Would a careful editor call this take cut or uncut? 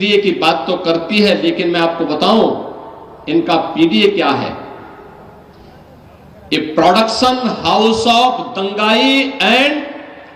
uncut